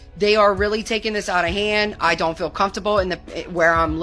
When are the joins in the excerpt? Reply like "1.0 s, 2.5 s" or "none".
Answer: none